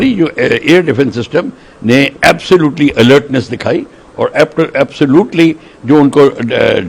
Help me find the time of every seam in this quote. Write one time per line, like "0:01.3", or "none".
none